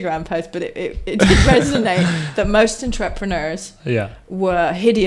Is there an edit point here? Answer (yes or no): no